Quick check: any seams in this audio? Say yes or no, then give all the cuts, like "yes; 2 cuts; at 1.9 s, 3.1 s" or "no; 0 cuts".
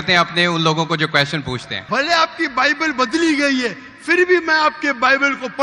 yes; 1 cut; at 1.7 s